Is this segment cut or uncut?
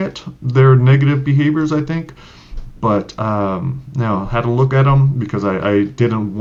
uncut